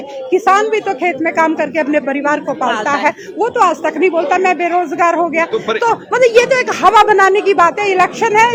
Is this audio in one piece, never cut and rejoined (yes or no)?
yes